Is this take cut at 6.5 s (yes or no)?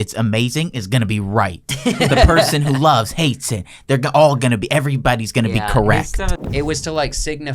yes